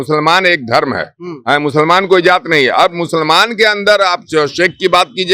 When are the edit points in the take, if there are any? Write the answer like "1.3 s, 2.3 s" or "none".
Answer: none